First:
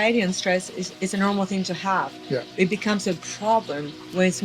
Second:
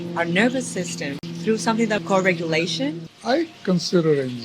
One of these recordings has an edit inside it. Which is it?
second; 3 cuts; at 1.2 s, 2.0 s, 3.1 s

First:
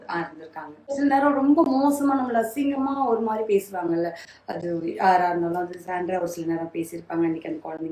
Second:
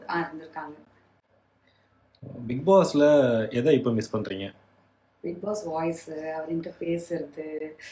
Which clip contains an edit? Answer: first; 1 cut; at 0.9 s

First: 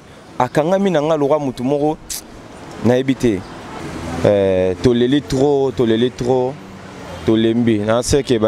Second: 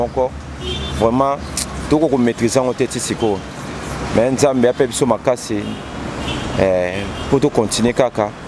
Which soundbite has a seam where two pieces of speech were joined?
first; 1 cut; at 3.6 s

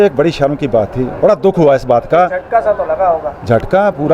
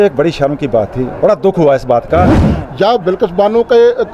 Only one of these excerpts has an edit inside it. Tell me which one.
second; 1 cut; at 2.4 s

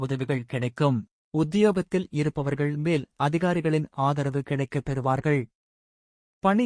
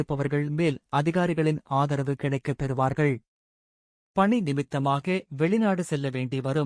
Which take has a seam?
first; 1 cut; at 1.2 s

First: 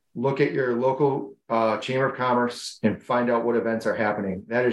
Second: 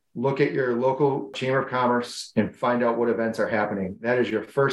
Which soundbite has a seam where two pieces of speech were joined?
second; 1 cut; at 1.4 s

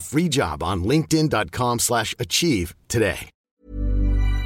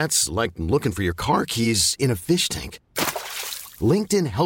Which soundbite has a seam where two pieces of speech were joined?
first; 1 cut; at 3.4 s

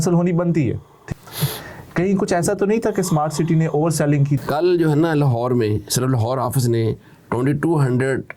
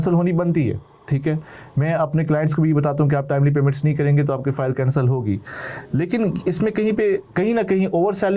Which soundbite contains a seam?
first; 2 cuts; at 1.1 s, 4.4 s

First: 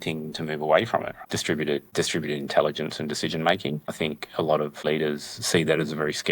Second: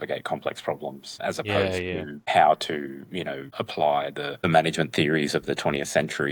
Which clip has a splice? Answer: first; 2 cuts; at 1.1 s, 4.8 s

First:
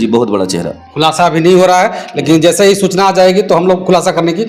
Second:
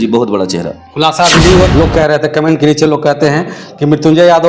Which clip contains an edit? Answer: second; 1 cut; at 1.7 s

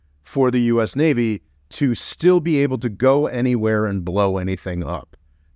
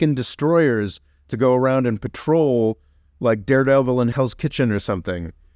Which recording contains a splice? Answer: second; 1 cut; at 4.1 s

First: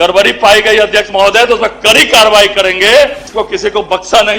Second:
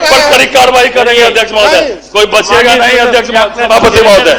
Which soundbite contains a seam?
first; 1 cut; at 3.2 s

